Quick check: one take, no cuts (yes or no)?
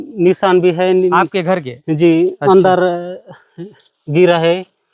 yes